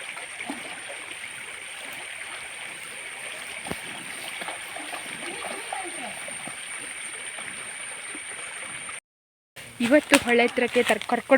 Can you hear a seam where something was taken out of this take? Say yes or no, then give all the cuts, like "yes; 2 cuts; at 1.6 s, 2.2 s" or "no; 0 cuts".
no; 0 cuts